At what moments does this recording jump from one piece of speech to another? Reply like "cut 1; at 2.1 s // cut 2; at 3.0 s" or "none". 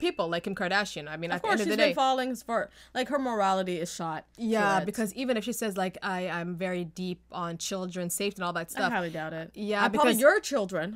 cut 1; at 4.3 s